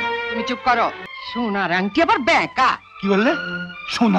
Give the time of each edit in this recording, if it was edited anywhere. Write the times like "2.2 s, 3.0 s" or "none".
1.1 s